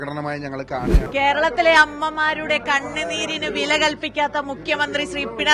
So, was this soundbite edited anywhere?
yes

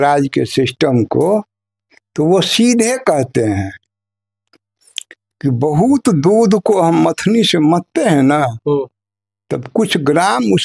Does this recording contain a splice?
no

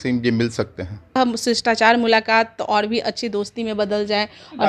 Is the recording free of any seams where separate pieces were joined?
no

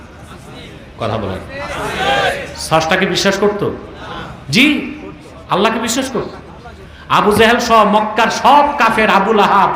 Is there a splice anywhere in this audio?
no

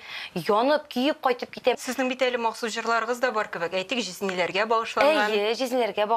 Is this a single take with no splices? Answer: no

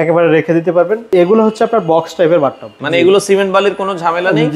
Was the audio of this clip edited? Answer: yes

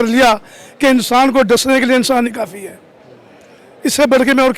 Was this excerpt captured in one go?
yes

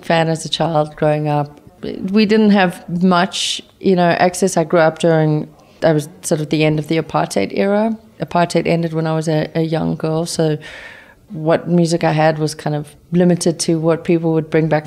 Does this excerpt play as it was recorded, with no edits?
no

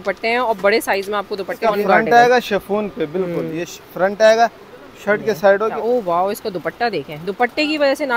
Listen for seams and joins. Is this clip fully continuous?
no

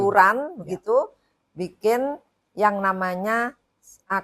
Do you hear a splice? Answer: no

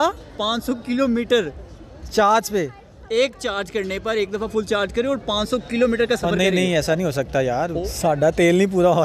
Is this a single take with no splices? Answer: no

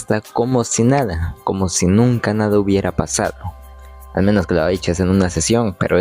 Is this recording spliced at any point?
no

